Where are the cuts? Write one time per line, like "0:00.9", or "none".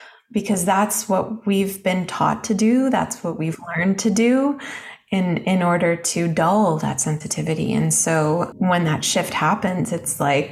0:08.5